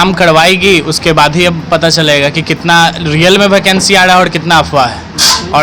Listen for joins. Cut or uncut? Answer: uncut